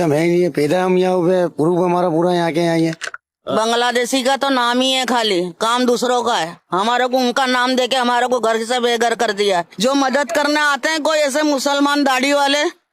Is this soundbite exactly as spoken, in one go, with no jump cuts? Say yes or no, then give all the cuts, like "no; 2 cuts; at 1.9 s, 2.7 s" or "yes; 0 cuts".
yes; 0 cuts